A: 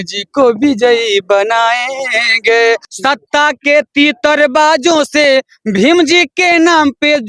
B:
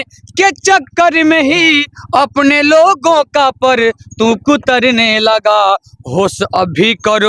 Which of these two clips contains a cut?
A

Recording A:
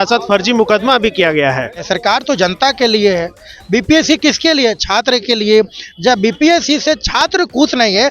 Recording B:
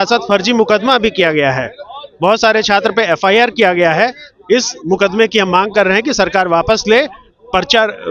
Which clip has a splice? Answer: A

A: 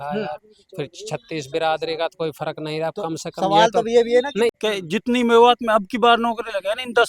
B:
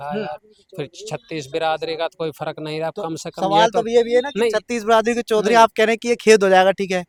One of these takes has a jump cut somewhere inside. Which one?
A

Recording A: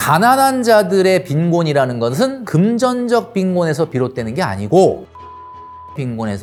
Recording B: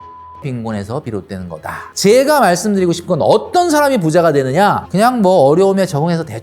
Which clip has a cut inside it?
B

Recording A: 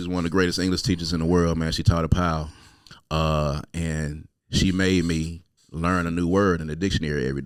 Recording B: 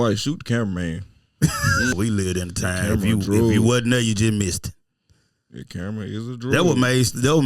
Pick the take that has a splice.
B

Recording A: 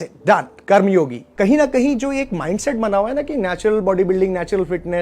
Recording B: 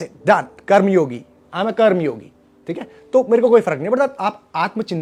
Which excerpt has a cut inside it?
A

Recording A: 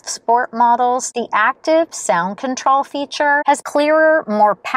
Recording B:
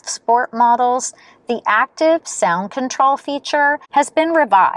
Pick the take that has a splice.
A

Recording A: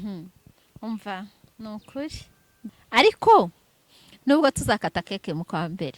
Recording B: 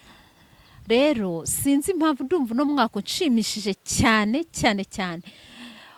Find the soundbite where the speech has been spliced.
A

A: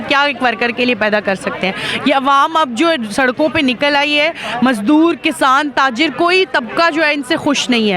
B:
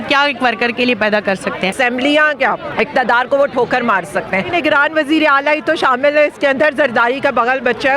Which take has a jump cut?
B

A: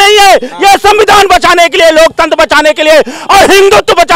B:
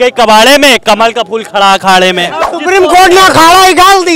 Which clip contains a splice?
B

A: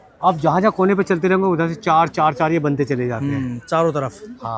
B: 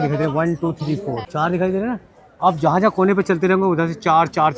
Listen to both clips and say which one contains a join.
B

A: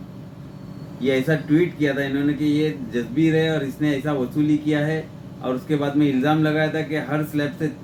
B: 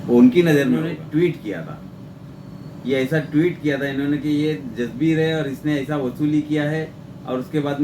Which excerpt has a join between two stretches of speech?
B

